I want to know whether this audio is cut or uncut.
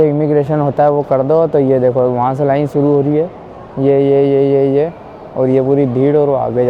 uncut